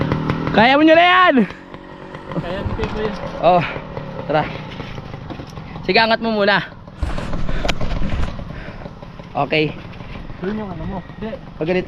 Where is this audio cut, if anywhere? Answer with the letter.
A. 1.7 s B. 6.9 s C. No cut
C